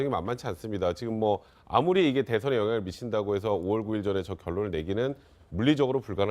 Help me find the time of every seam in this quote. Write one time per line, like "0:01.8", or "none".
0:03.0